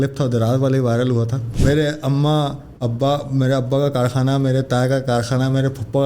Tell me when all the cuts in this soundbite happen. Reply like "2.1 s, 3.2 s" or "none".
1.4 s

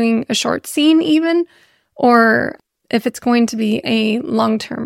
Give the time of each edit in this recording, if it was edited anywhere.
2.5 s

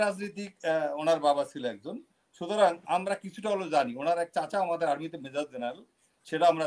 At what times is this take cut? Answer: none

